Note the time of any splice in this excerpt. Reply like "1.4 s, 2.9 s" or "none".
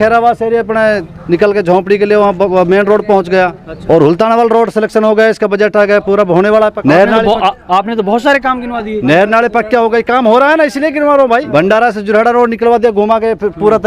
3.7 s, 6.8 s, 11.5 s